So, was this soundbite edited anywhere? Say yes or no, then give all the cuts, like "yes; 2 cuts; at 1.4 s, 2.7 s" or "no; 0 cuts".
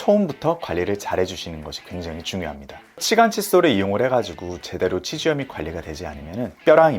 yes; 1 cut; at 3.0 s